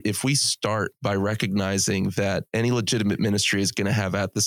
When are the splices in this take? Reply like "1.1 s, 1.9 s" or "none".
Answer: 0.9 s, 2.5 s